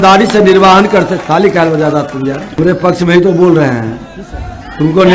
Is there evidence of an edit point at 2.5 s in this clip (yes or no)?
yes